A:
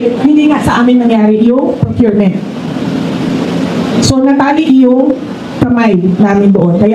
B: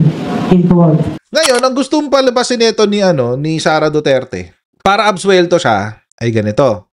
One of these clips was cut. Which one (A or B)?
B